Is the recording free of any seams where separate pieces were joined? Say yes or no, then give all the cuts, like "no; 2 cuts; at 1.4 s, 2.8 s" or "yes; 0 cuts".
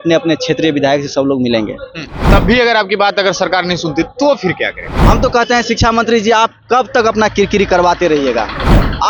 no; 2 cuts; at 2.3 s, 5.0 s